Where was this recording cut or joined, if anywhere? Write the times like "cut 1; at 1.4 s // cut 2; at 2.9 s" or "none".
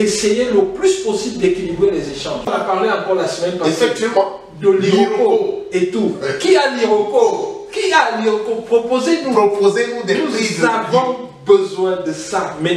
cut 1; at 2.5 s